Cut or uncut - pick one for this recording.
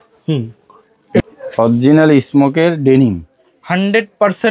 cut